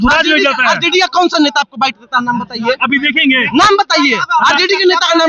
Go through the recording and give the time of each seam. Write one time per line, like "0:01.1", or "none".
none

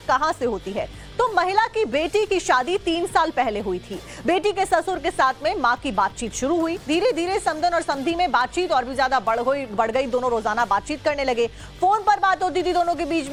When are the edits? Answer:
none

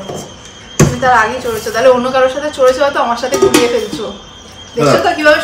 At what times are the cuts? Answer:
none

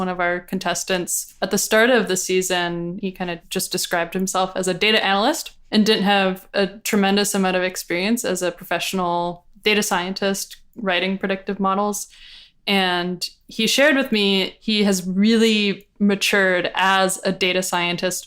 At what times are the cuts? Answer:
0:01.2
0:03.0
0:05.5
0:14.6

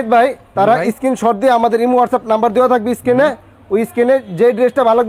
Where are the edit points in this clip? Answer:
none

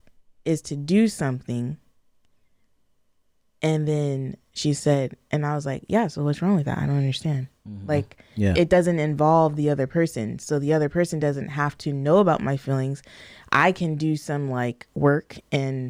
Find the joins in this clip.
none

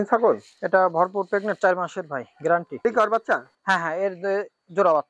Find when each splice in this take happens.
0:02.8

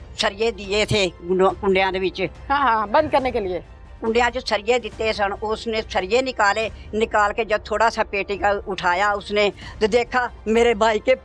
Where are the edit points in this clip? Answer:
none

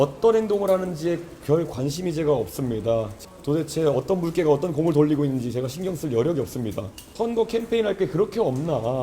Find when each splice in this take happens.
0:03.1
0:07.1

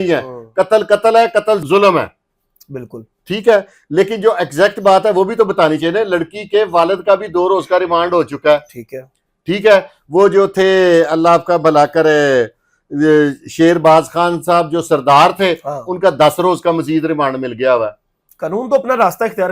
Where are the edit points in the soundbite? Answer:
none

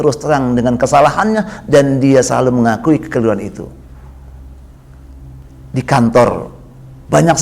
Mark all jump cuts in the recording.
0:05.4

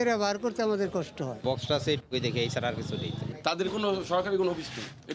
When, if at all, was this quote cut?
0:01.2
0:03.2

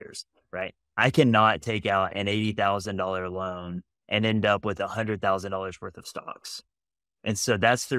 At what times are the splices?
0:06.6

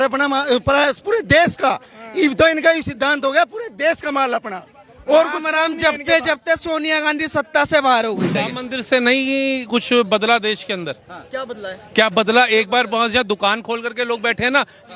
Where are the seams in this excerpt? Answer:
0:08.3

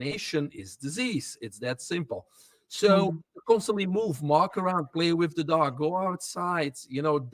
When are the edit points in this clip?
none

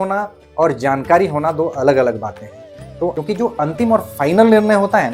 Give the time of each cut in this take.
0:03.1

